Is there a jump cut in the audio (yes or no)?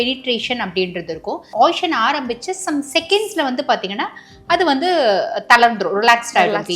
yes